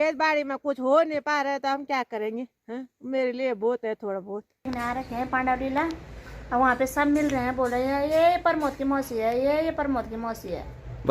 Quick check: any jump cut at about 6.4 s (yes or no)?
no